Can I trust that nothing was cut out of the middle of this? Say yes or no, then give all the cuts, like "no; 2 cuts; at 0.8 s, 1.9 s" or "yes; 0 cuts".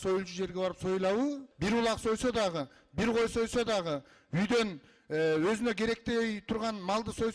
no; 1 cut; at 1.5 s